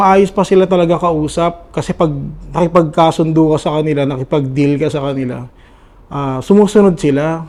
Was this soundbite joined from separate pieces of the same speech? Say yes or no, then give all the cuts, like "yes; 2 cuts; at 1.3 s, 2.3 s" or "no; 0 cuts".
no; 0 cuts